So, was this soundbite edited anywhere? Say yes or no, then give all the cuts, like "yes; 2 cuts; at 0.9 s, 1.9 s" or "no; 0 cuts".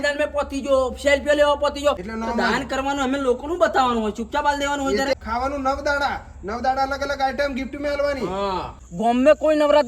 yes; 3 cuts; at 2.0 s, 5.1 s, 8.8 s